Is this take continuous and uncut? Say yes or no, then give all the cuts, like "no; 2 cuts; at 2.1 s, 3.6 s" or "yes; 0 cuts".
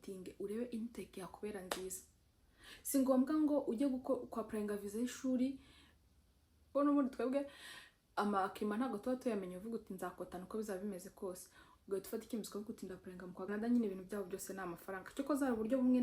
no; 2 cuts; at 6.7 s, 13.5 s